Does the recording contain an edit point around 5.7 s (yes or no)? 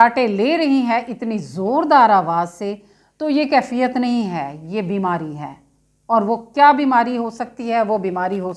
no